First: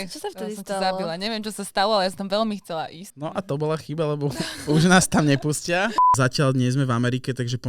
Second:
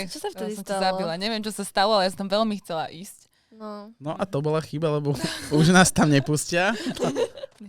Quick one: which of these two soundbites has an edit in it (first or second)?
first